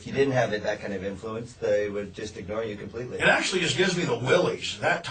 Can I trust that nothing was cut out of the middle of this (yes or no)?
no